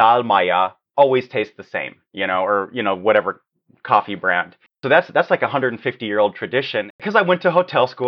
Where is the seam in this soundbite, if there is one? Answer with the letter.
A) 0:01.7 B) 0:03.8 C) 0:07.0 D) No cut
C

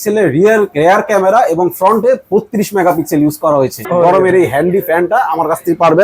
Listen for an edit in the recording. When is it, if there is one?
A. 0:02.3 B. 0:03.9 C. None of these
B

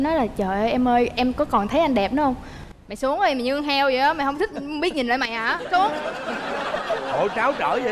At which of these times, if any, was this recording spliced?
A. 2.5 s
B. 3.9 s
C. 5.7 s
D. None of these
D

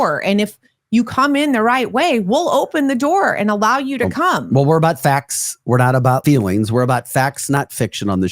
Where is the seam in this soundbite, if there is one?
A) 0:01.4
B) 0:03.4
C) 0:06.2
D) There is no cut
C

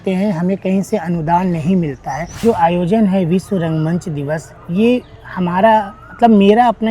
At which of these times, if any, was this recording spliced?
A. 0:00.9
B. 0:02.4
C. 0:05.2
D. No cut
B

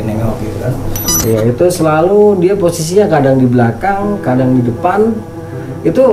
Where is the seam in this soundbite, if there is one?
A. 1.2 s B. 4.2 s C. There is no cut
A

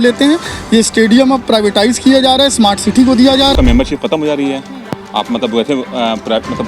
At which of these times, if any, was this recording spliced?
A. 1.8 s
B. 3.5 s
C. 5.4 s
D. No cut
B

